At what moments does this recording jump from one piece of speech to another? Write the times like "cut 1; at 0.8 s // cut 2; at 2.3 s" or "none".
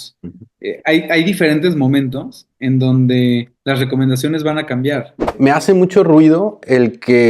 cut 1; at 3.5 s // cut 2; at 5.4 s